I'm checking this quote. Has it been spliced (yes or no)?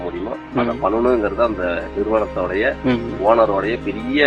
no